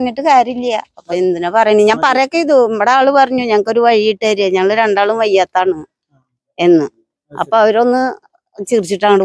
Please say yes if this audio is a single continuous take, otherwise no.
yes